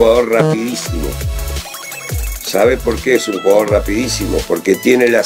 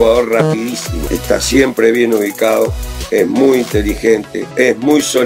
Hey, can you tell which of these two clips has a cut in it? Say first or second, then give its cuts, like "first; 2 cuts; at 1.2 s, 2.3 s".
second; 2 cuts; at 0.9 s, 4.4 s